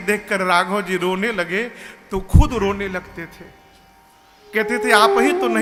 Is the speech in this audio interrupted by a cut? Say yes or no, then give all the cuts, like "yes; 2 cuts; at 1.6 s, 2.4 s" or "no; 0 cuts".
no; 0 cuts